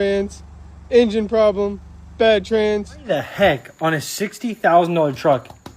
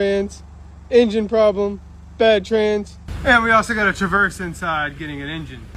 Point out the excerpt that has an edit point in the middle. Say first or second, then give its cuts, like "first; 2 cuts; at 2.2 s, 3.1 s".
first; 1 cut; at 2.9 s